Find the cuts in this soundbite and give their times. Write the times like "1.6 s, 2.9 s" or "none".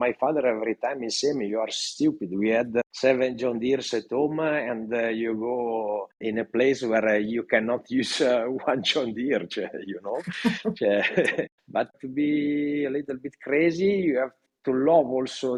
none